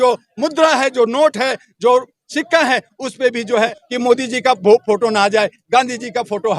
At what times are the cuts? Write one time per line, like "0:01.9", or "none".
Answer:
0:03.8